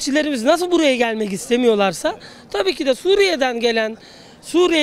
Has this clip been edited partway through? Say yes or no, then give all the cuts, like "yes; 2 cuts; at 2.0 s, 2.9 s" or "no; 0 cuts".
no; 0 cuts